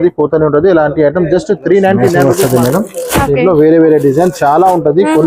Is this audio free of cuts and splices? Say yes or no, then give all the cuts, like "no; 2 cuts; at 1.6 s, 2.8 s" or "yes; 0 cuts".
no; 1 cut; at 2.3 s